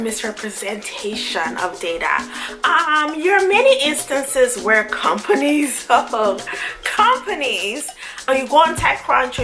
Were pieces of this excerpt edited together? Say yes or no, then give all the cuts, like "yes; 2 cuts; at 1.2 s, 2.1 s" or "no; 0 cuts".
yes; 1 cut; at 8.3 s